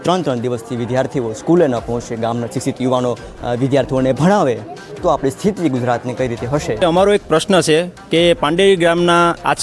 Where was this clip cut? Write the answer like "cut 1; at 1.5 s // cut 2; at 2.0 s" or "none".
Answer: cut 1; at 6.8 s